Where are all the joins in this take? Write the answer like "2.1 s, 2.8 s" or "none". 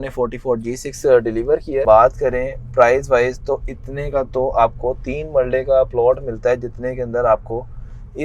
1.8 s